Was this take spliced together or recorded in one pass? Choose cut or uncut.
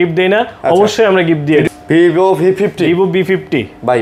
cut